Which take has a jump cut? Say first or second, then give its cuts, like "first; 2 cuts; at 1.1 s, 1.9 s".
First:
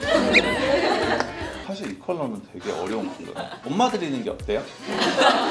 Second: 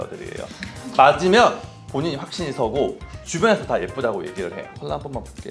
first; 1 cut; at 1.6 s